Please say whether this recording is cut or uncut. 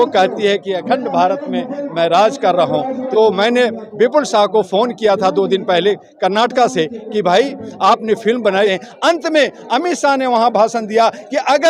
cut